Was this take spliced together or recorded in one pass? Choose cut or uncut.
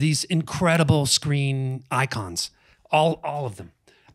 uncut